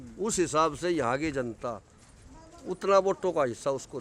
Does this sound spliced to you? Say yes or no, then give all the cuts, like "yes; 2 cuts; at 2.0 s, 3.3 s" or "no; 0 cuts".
no; 0 cuts